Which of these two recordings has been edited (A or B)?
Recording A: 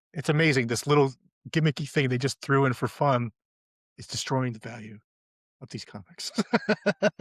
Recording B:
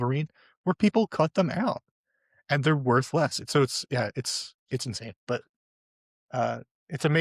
B